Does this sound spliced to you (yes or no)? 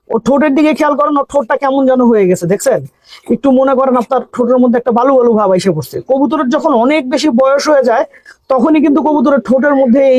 no